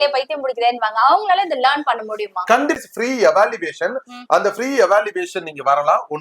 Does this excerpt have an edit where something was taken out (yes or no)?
yes